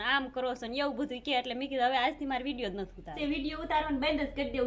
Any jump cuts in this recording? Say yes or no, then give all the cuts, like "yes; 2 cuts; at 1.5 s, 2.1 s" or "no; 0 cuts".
yes; 1 cut; at 3.1 s